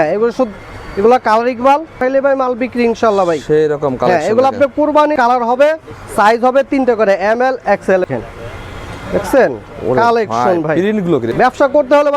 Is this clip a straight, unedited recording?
no; 4 cuts; at 2.0 s, 5.1 s, 8.1 s, 11.3 s

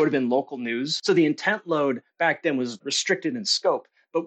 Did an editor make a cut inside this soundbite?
yes; 2 cuts; at 0.9 s, 2.9 s

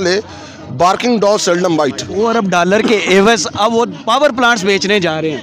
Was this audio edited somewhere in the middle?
no; 0 cuts

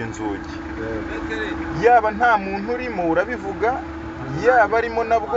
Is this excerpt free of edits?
yes; 0 cuts

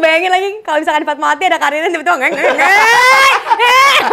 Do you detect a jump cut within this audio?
no; 0 cuts

